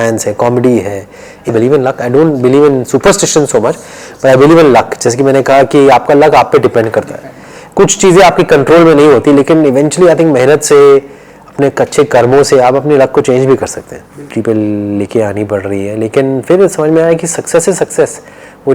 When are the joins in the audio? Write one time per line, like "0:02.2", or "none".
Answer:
0:01.5
0:14.3